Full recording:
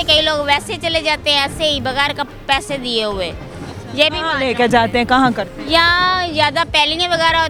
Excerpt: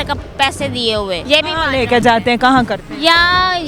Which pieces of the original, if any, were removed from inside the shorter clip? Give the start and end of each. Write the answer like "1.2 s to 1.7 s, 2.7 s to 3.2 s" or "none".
3.3 s to 3.9 s